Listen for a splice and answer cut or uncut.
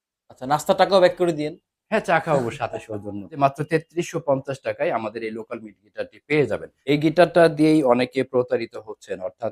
cut